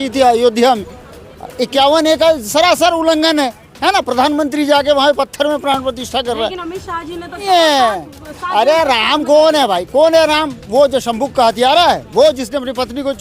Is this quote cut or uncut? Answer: cut